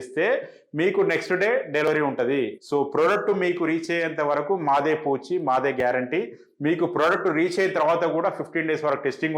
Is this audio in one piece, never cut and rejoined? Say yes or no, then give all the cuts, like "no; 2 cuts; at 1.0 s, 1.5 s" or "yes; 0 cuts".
no; 1 cut; at 2.6 s